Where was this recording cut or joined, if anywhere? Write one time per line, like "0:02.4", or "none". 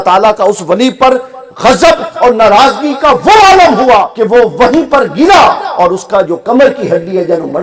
0:04.5

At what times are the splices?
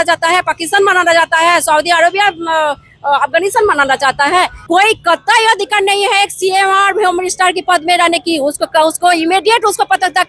0:04.6

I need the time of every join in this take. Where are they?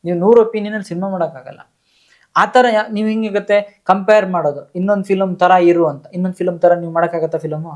none

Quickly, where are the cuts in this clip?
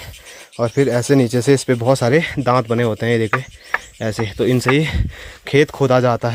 none

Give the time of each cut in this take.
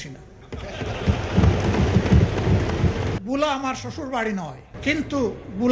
0:03.2
0:04.7

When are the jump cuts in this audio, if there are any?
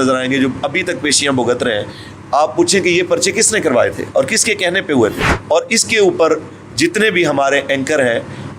0:05.3

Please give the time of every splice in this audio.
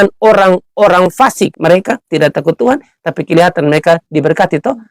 0:01.5

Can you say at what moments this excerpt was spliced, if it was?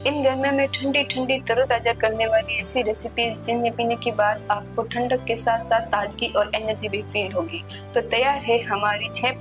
none

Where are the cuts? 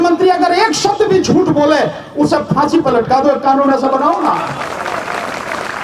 none

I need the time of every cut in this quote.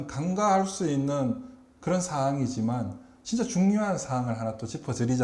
none

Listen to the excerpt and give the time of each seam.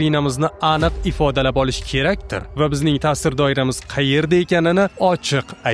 none

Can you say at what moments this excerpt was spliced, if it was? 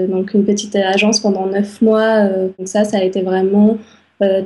0:02.6

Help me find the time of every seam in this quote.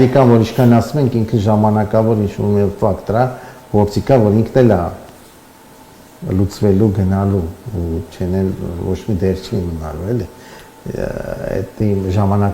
none

